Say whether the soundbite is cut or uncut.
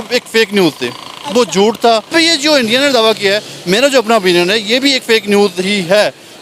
cut